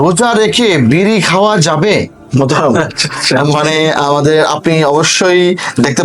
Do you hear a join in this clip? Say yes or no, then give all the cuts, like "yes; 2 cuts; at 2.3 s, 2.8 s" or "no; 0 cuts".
yes; 1 cut; at 2.2 s